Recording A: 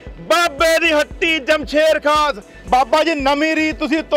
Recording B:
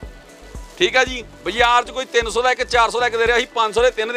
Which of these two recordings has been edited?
A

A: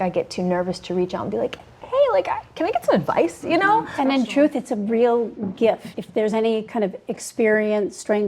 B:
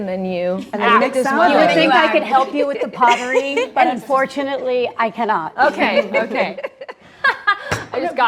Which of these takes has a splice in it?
A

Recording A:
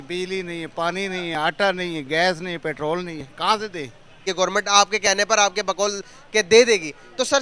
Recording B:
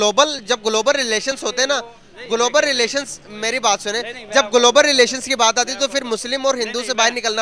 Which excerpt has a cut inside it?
A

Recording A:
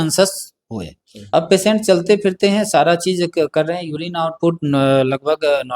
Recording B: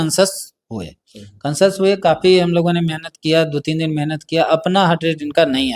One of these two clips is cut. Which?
A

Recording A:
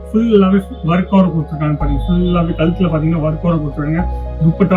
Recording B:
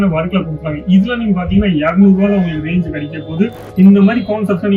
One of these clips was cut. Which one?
B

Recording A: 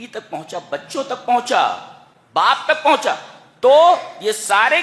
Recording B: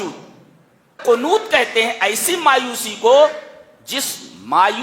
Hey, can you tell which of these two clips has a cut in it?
B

